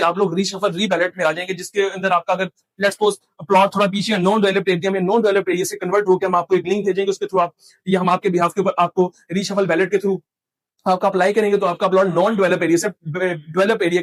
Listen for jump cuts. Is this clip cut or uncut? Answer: uncut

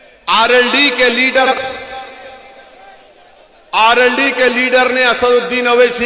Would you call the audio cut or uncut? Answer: cut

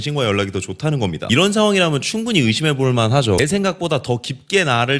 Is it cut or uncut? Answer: cut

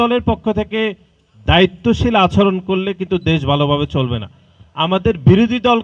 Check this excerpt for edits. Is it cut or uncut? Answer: uncut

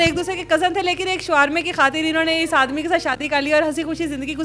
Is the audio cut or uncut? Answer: uncut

